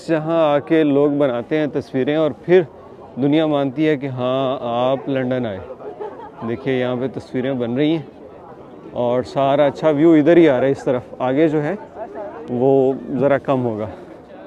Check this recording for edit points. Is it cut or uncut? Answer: uncut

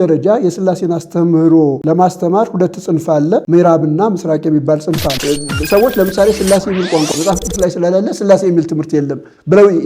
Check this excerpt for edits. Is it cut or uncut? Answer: cut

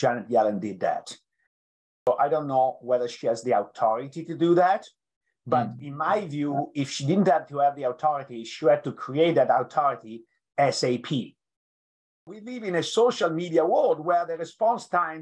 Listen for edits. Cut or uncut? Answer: cut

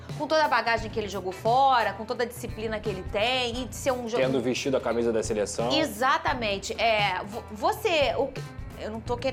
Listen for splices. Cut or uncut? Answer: uncut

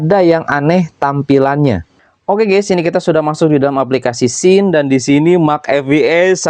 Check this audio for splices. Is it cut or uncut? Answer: cut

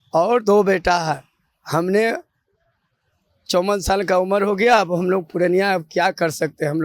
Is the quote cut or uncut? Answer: uncut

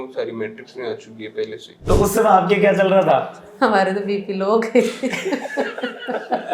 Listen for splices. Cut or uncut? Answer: cut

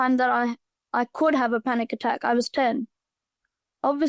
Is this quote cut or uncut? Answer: uncut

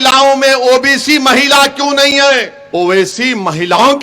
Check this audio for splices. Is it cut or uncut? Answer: cut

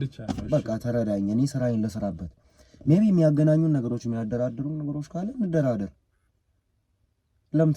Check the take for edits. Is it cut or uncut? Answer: uncut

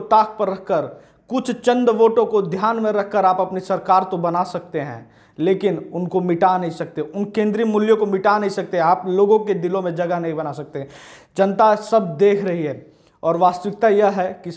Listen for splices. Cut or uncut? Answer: uncut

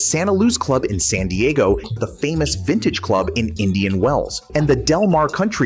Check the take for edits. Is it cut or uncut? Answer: cut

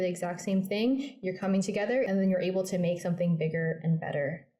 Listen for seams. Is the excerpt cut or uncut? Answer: cut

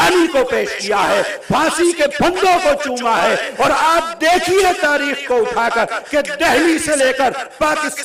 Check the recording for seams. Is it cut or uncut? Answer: uncut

